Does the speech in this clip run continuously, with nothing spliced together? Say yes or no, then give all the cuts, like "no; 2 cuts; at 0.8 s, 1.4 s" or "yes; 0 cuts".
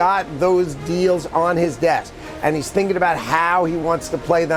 yes; 0 cuts